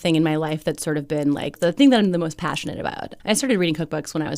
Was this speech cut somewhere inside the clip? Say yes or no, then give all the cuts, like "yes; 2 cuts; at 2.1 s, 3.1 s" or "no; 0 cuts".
yes; 2 cuts; at 1.6 s, 3.1 s